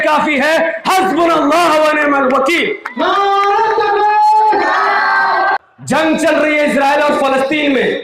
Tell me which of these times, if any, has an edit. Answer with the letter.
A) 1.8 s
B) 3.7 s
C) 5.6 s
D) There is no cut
C